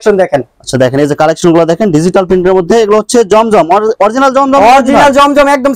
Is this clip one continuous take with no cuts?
yes; 0 cuts

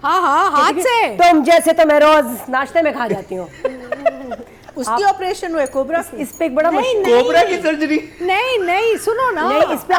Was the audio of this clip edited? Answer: no; 0 cuts

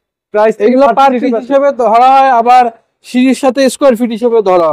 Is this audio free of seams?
yes; 0 cuts

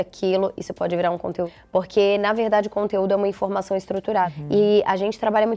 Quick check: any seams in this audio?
yes; 2 cuts; at 1.6 s, 4.4 s

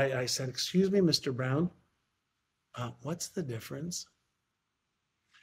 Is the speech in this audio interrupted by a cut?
no; 0 cuts

